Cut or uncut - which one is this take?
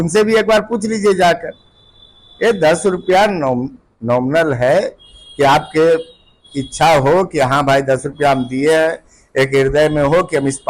uncut